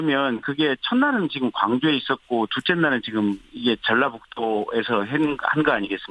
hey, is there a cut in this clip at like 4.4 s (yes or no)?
no